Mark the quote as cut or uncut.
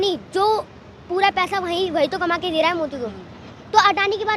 uncut